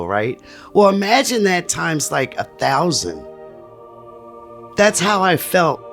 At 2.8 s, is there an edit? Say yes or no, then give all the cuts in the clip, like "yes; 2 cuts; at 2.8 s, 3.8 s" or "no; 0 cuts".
no; 1 cut; at 4.7 s